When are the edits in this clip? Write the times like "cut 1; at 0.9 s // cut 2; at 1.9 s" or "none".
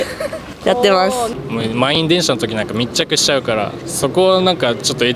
cut 1; at 1.3 s